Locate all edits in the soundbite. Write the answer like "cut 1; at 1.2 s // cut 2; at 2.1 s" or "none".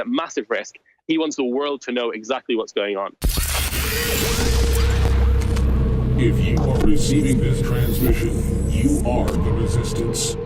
cut 1; at 3.3 s